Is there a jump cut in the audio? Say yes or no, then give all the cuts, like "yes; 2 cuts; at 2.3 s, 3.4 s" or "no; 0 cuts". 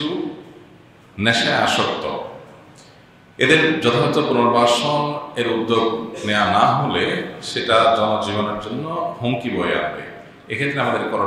no; 0 cuts